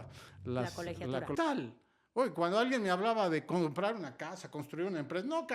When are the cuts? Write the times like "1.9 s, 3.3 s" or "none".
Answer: 1.3 s